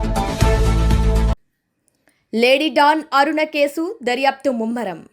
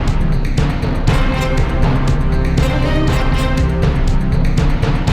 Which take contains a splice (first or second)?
first